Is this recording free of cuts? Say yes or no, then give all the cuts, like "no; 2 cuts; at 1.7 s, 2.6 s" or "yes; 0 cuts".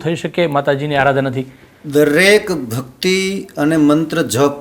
yes; 0 cuts